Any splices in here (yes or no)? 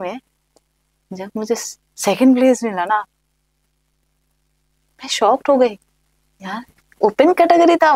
no